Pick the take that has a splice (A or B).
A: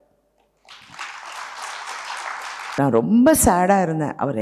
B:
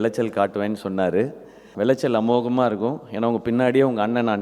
A